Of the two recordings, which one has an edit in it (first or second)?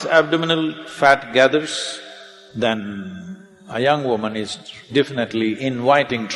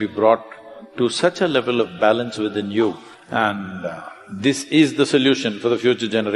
second